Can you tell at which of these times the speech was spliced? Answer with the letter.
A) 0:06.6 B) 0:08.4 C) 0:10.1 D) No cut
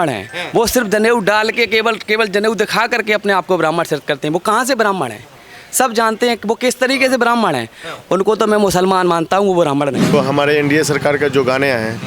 C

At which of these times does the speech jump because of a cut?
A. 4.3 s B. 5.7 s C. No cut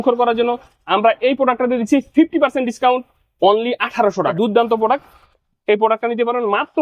A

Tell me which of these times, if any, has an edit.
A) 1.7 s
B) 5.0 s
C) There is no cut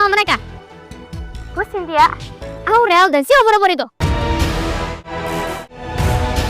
B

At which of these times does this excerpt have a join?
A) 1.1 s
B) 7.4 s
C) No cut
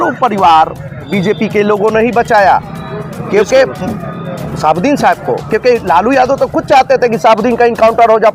A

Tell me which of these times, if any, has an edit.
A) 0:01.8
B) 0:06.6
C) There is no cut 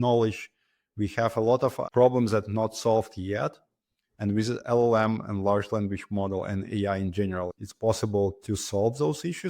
A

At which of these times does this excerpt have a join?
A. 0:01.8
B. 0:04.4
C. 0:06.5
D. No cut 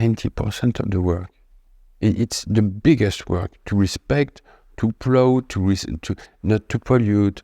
D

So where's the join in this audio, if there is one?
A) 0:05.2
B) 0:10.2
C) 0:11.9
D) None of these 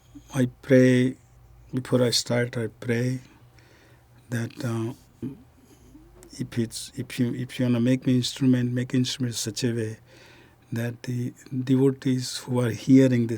A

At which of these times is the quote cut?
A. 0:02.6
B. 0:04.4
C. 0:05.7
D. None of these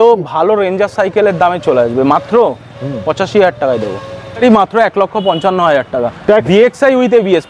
B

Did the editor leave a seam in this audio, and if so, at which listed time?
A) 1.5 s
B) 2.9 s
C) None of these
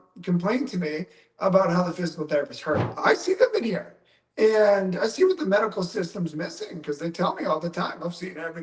B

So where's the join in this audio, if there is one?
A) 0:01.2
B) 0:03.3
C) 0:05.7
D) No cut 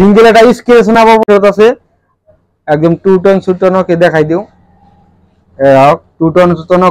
A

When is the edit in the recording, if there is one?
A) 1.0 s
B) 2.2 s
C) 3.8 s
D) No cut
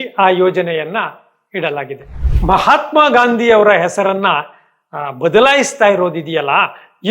B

